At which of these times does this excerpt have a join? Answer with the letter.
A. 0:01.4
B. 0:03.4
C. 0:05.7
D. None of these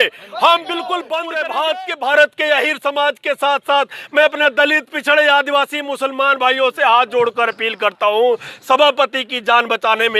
A